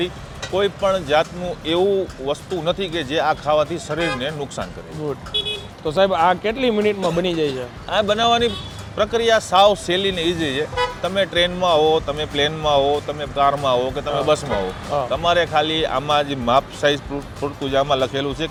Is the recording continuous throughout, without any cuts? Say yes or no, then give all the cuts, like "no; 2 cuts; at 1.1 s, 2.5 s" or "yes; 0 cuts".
yes; 0 cuts